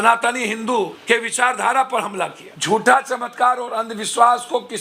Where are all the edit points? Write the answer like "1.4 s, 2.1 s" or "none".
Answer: 1.0 s, 2.5 s